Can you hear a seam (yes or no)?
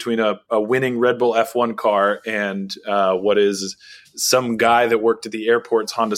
no